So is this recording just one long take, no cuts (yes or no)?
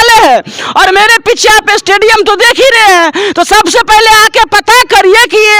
yes